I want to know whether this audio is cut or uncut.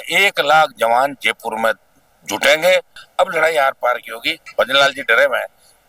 cut